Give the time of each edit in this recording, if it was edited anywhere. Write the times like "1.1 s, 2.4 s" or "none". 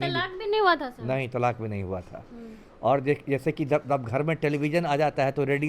none